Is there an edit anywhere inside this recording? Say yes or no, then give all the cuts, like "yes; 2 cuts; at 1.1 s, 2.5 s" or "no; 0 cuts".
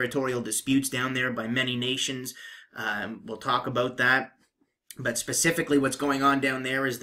no; 0 cuts